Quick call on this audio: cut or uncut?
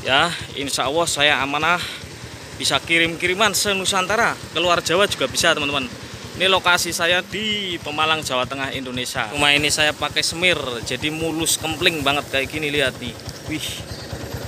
cut